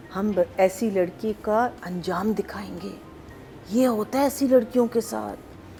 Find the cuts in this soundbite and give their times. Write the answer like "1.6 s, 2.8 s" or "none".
none